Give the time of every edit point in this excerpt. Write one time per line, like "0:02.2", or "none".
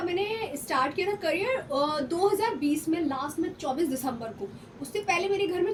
none